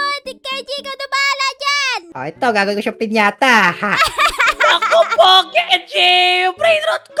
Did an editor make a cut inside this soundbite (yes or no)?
no